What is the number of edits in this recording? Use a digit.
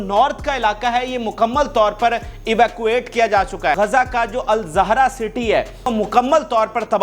2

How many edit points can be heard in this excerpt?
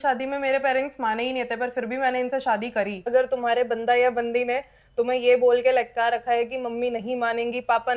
1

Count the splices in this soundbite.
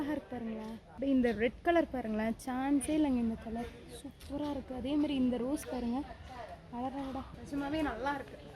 2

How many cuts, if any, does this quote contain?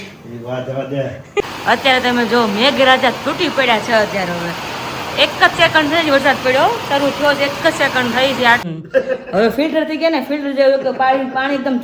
2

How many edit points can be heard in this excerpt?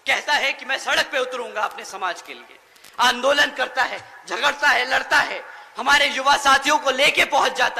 0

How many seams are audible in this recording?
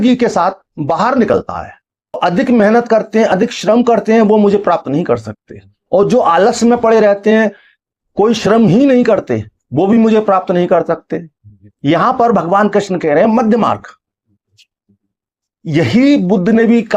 1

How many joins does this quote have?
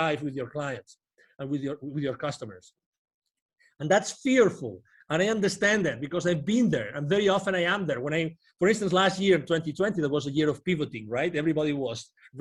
0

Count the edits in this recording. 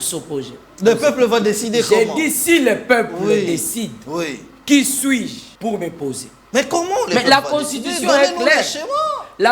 1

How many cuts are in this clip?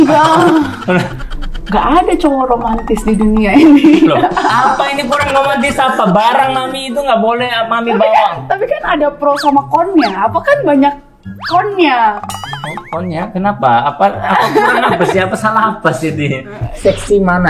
2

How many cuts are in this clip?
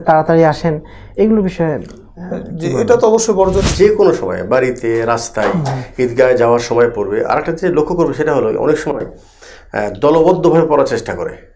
1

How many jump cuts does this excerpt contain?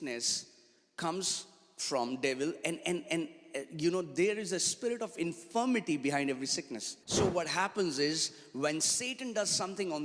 1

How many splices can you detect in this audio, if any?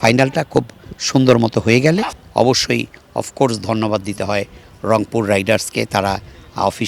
1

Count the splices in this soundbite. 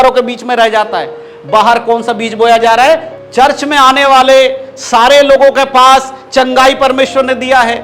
1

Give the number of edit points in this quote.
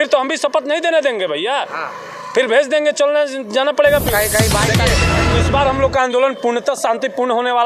1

